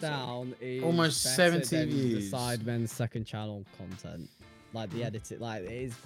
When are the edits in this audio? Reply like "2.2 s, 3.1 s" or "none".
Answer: none